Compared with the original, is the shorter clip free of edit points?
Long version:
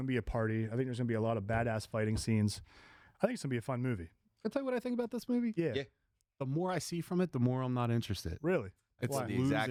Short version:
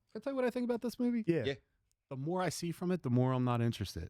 yes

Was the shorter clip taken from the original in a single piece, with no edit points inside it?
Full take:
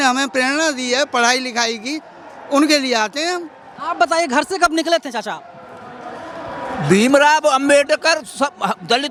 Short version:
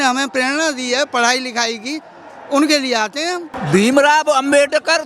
no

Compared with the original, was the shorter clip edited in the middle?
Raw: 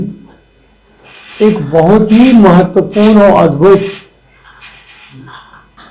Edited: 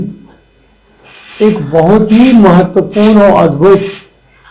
no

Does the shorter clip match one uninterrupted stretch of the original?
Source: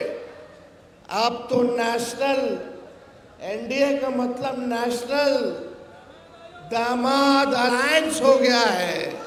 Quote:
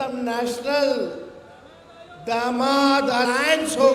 yes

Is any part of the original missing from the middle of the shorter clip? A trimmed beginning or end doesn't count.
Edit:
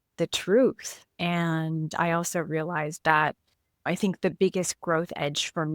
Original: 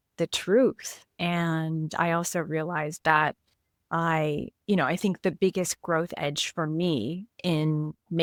yes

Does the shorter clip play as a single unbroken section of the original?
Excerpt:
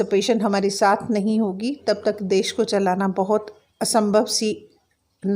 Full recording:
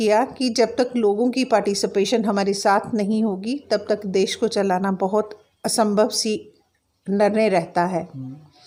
yes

